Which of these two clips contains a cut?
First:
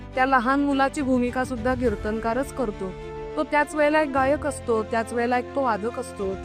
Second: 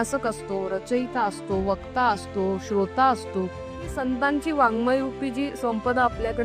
second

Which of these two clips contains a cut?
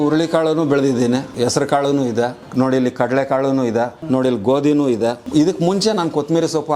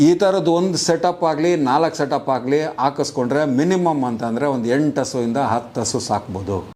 first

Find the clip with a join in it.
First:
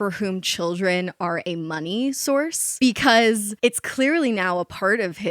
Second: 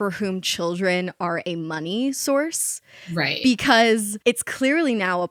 first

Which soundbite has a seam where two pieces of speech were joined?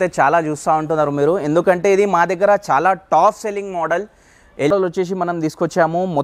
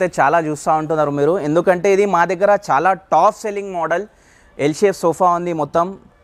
first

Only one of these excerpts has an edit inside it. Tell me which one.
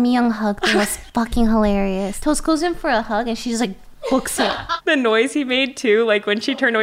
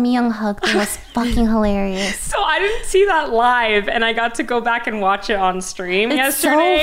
first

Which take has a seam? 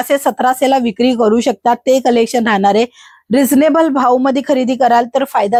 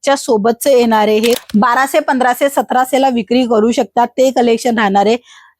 second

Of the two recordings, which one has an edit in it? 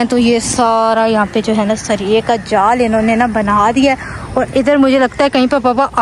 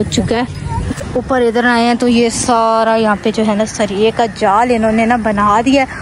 second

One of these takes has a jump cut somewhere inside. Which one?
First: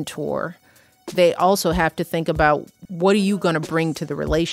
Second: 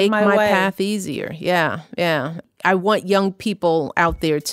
first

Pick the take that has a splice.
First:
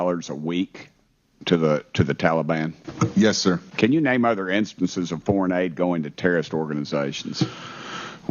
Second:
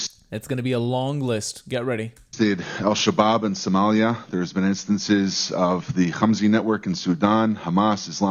first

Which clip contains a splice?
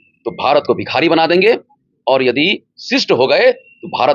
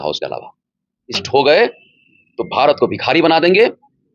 second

